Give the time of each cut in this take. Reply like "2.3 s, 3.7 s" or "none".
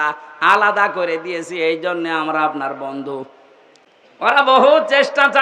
4.1 s